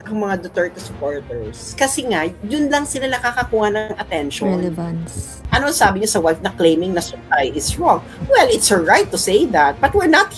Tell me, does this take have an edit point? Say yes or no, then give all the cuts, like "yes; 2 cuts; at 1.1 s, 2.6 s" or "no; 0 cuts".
yes; 2 cuts; at 4.0 s, 5.3 s